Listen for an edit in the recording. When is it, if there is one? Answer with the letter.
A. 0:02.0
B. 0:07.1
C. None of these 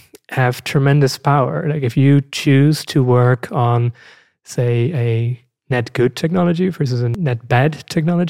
B